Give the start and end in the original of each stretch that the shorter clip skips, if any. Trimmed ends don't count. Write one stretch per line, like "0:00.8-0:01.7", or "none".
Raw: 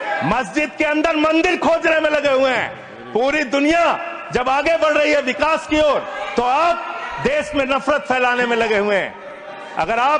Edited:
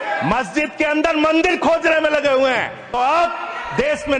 0:02.9-0:06.4